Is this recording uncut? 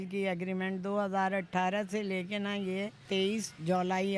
no; 1 cut; at 3.0 s

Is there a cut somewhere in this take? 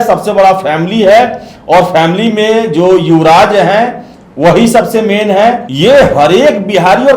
yes; 1 cut; at 5.7 s

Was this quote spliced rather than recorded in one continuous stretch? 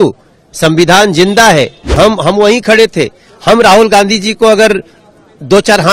yes; 1 cut; at 1.9 s

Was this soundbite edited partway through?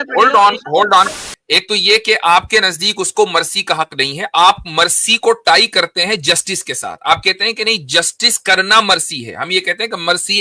yes; 1 cut; at 1.2 s

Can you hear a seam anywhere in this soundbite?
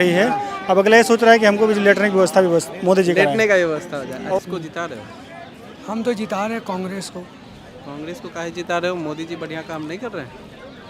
yes; 1 cut; at 4.4 s

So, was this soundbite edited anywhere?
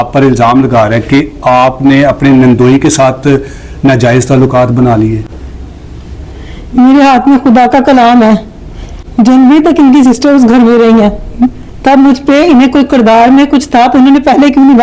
no; 0 cuts

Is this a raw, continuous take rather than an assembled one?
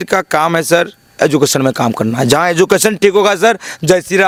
yes; 0 cuts

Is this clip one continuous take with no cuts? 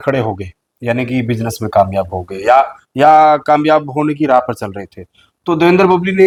yes; 0 cuts

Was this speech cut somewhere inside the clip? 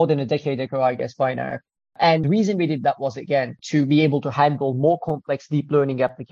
yes; 2 cuts; at 2.2 s, 3.6 s

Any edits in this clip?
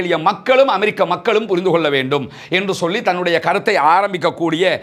no; 0 cuts

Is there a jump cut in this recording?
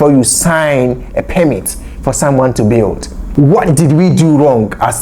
yes; 1 cut; at 3.1 s

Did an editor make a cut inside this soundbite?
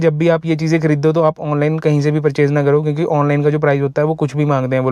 no; 0 cuts

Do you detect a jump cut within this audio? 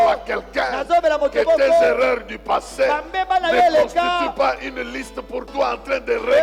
no; 0 cuts

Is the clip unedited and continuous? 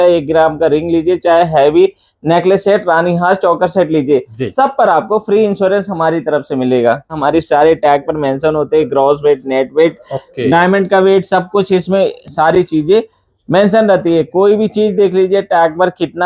no; 1 cut; at 7.2 s

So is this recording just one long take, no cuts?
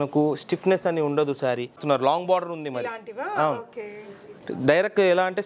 no; 1 cut; at 1.8 s

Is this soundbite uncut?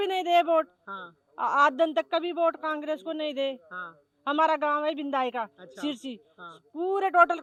yes; 0 cuts

